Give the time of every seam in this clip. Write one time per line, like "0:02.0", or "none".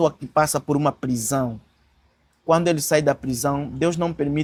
none